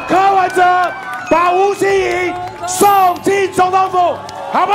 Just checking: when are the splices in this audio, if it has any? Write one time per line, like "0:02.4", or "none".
none